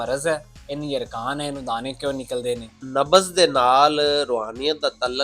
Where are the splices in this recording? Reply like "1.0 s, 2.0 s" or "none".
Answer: 2.8 s